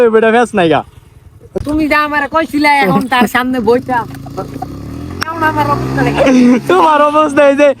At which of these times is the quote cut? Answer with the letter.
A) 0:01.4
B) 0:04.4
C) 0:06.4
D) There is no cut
A